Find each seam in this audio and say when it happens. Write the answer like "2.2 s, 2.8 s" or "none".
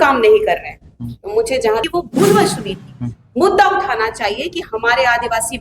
1.8 s